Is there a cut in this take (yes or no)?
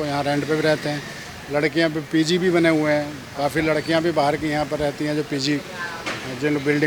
no